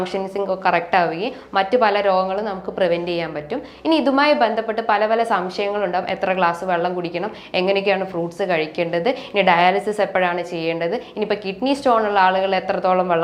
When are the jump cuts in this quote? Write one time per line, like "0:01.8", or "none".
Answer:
none